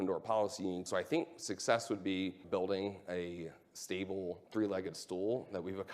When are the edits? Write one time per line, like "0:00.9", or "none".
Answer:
0:00.9
0:02.4
0:04.4